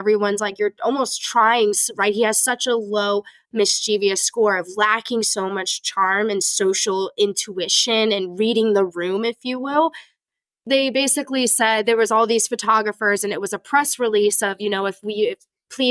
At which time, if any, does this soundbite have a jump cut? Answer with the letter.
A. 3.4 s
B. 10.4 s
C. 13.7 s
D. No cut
B